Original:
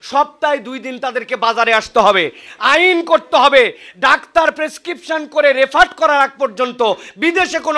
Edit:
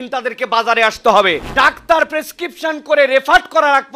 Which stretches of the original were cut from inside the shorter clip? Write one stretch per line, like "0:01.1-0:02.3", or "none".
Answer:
0:02.3-0:03.9